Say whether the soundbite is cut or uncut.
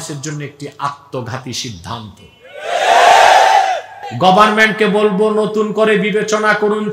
cut